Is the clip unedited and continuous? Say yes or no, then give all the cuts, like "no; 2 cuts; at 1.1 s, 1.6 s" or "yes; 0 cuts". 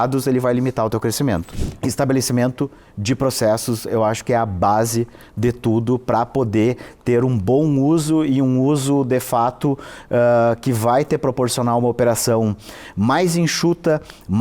no; 1 cut; at 1.5 s